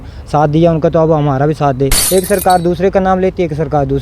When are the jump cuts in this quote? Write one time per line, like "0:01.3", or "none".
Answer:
0:02.0